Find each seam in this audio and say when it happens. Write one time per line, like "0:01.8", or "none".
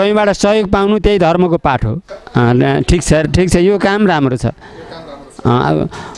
none